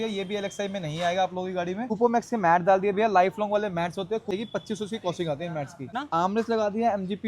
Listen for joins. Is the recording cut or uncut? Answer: cut